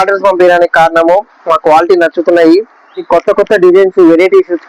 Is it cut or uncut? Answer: cut